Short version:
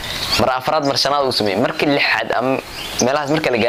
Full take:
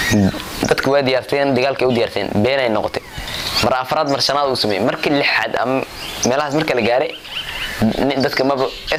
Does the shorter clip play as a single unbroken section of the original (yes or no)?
yes